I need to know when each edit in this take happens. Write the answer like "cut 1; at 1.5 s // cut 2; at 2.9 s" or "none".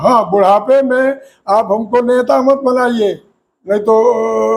none

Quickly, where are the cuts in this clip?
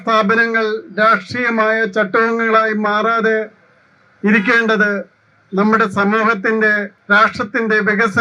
cut 1; at 6.9 s

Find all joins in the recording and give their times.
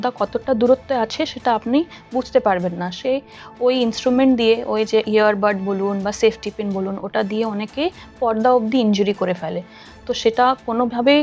none

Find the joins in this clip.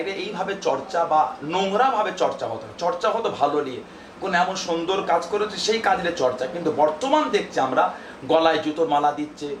none

